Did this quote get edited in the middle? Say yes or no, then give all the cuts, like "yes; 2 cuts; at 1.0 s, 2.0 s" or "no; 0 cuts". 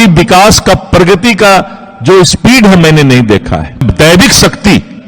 yes; 1 cut; at 3.9 s